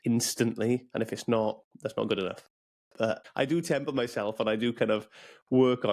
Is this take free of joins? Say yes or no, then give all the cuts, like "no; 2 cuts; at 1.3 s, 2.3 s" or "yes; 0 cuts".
no; 1 cut; at 3.3 s